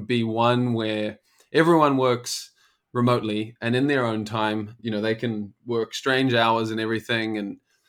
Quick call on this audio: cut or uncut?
uncut